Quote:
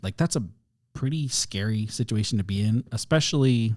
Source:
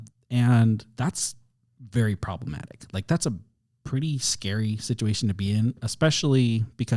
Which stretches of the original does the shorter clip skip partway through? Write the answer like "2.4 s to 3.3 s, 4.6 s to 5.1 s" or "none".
none